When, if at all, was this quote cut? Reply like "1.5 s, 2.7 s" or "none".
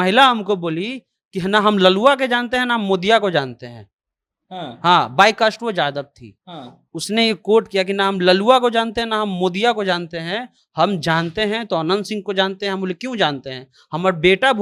none